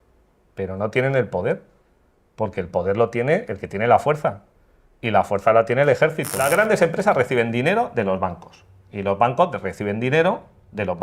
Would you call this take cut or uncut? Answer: cut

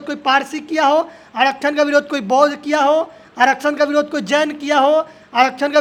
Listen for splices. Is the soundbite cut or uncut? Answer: uncut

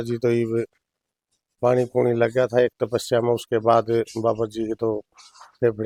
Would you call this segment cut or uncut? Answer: uncut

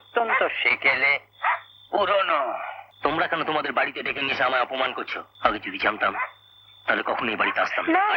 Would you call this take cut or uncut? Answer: cut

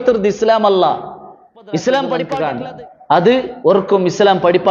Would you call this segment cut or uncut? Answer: cut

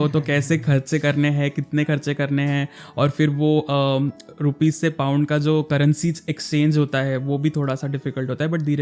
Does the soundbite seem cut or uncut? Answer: uncut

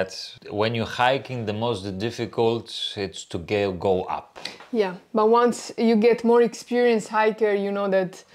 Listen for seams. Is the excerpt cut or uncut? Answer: uncut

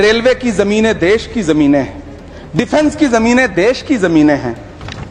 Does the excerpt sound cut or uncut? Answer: uncut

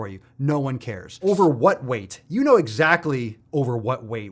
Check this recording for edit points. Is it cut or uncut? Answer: cut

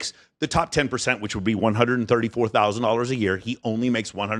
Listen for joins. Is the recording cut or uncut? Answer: uncut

